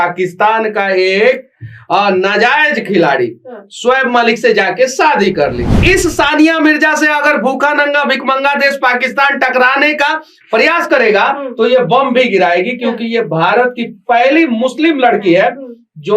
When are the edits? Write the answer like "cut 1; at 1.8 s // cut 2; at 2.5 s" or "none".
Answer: cut 1; at 5.8 s